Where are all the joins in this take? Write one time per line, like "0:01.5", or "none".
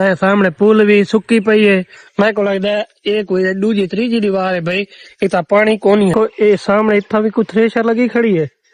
0:06.1